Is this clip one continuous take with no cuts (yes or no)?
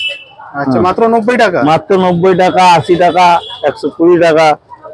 yes